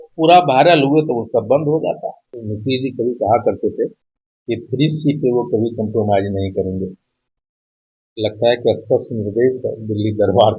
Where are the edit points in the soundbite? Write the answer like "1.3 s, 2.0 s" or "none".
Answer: 2.4 s